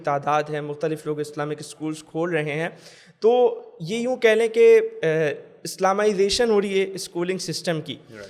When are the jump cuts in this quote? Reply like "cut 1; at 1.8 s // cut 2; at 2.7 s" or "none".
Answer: none